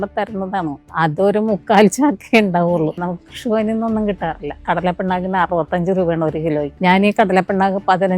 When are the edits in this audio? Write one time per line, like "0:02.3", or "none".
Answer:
0:00.9
0:02.8
0:04.6
0:06.7